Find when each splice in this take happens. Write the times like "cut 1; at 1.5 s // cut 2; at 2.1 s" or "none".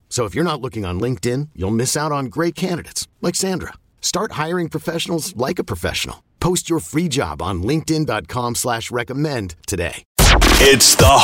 cut 1; at 10.0 s